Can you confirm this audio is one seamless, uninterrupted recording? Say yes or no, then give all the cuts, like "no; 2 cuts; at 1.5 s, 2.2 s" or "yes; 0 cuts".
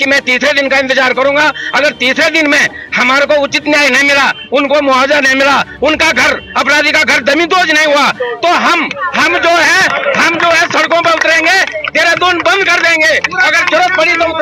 yes; 0 cuts